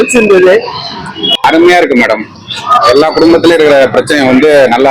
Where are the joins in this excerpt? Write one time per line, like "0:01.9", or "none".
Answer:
0:01.5